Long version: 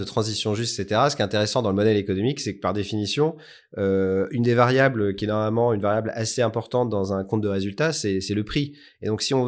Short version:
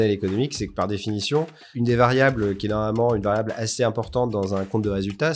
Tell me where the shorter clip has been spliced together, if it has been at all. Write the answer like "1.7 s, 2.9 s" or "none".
1.7 s